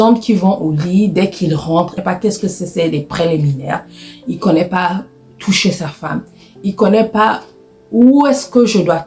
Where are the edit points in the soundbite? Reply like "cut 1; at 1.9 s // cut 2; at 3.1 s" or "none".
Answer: cut 1; at 2.0 s